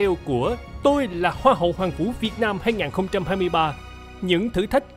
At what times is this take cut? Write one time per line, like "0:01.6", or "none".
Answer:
0:03.8